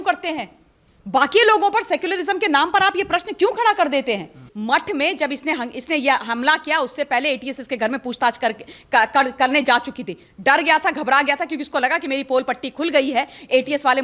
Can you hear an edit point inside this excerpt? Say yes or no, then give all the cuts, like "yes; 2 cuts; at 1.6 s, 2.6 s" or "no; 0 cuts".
yes; 1 cut; at 4.5 s